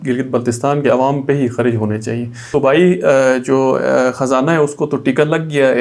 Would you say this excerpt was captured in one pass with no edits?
no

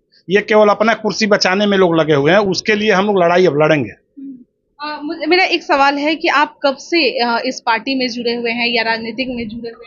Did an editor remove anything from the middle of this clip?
no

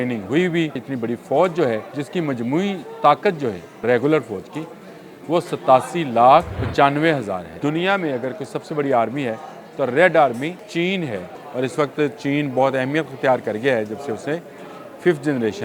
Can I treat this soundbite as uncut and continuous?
no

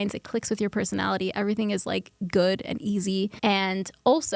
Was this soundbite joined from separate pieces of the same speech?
yes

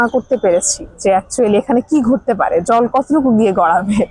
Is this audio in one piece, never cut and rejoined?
yes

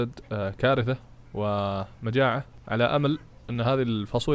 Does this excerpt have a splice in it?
no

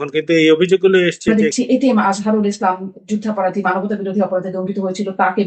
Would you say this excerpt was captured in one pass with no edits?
no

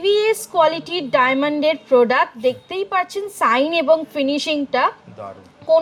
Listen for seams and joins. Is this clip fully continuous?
yes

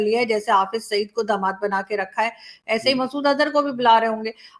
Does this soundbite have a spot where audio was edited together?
no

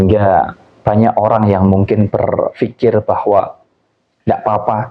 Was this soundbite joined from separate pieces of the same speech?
no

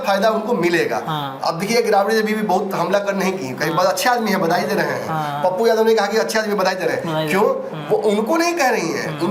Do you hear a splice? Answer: no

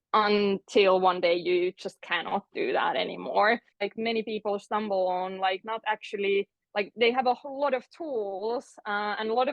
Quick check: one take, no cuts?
no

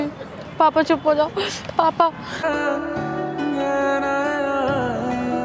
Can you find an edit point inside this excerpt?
no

